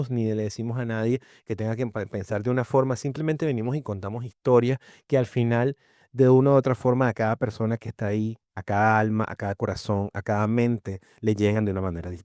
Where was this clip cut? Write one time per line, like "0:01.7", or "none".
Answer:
none